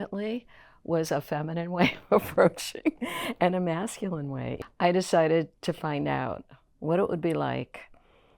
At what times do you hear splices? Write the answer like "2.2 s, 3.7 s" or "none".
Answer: 4.5 s